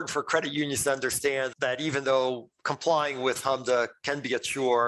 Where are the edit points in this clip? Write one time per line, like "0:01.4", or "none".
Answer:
0:01.5